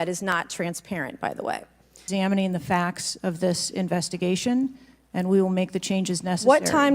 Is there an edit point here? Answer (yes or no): yes